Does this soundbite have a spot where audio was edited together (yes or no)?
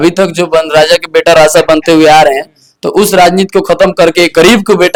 no